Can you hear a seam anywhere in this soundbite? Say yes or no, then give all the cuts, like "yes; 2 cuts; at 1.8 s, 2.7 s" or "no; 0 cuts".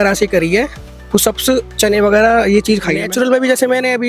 yes; 1 cut; at 3.0 s